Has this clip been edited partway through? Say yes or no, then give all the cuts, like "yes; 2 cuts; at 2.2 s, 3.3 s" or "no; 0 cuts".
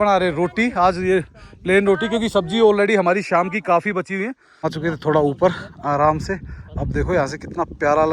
yes; 1 cut; at 4.4 s